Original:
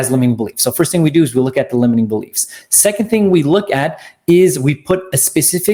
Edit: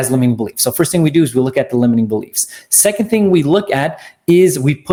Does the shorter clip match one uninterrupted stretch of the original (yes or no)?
yes